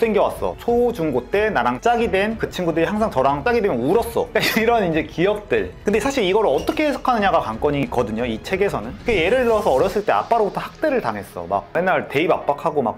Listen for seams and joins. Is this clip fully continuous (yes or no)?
no